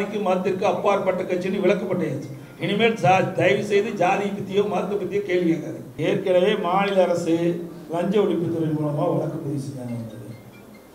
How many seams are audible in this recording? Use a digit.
1